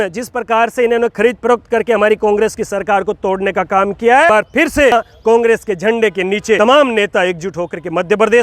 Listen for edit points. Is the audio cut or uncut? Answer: cut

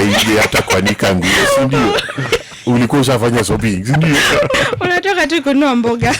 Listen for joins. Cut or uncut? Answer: cut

